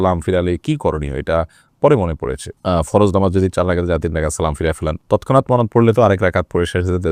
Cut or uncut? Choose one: uncut